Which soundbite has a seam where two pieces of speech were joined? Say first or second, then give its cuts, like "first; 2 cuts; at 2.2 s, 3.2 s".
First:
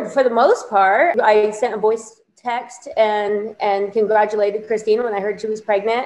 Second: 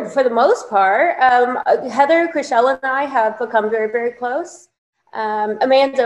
first; 1 cut; at 1.2 s